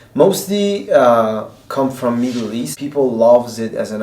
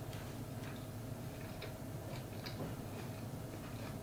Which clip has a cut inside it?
first; 1 cut; at 2.8 s

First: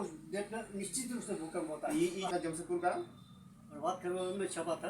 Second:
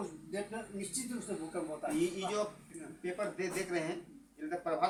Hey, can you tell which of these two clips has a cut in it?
first; 1 cut; at 2.3 s

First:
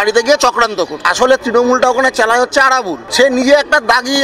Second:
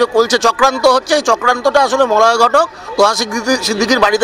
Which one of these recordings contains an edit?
first; 2 cuts; at 1.0 s, 3.0 s

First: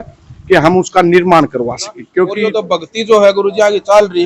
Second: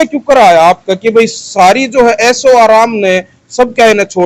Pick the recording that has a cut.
first; 1 cut; at 2.6 s

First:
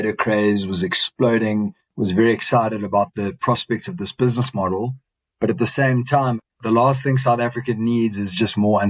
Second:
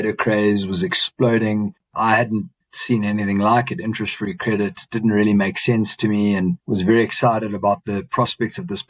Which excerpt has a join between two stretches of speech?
first; 2 cuts; at 1.9 s, 6.4 s

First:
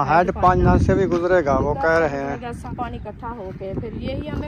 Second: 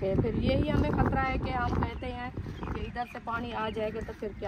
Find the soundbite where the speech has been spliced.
first; 1 cut; at 2.7 s

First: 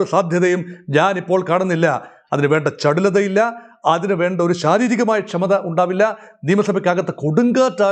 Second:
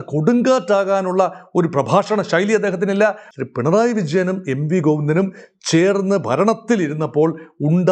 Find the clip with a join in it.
second; 1 cut; at 3.3 s

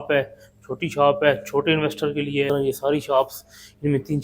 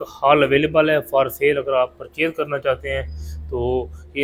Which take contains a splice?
first; 1 cut; at 2.5 s

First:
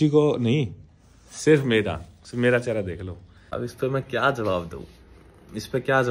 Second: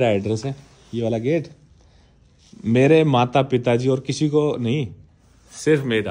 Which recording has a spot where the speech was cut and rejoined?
first; 1 cut; at 3.3 s

